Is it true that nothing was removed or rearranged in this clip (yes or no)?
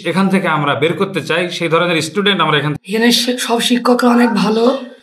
no